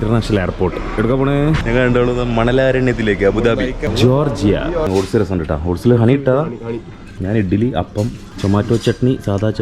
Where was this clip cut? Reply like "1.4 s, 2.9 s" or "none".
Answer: 1.6 s, 3.8 s, 4.9 s, 7.1 s, 8.2 s